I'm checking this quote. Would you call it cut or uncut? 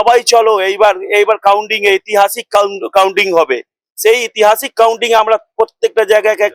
uncut